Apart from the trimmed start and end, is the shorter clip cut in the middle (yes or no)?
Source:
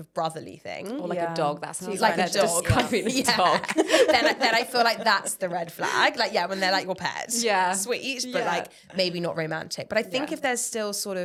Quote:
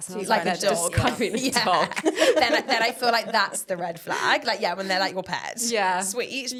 no